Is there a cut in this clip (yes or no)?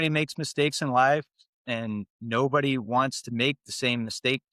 no